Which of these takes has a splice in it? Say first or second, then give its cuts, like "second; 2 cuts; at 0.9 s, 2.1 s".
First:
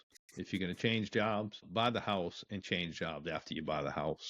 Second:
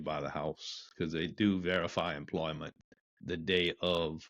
first; 1 cut; at 1.6 s